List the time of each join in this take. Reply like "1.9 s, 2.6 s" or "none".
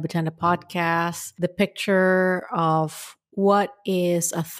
1.2 s

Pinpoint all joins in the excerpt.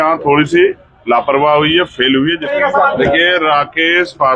2.4 s

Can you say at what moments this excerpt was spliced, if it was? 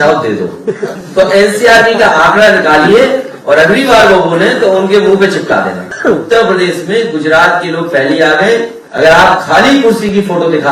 0.9 s, 6.0 s, 8.8 s

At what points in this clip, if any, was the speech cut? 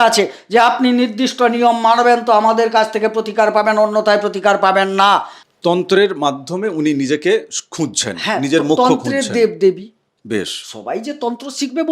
5.3 s

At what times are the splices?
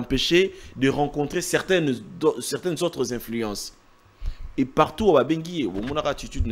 none

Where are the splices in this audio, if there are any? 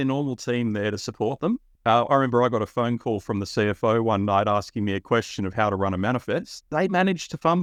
none

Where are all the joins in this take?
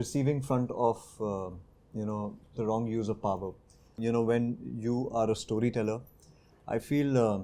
4.0 s

